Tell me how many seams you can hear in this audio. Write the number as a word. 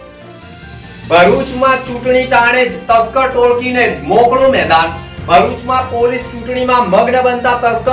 one